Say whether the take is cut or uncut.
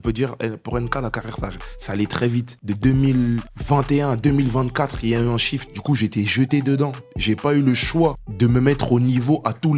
uncut